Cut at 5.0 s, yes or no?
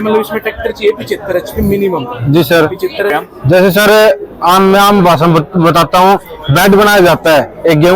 no